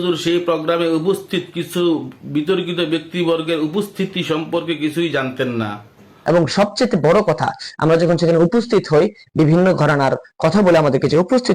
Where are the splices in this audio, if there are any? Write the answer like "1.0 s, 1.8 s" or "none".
6.1 s